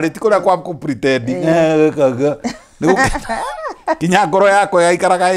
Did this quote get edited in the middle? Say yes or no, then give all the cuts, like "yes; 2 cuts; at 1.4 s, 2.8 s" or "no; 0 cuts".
no; 0 cuts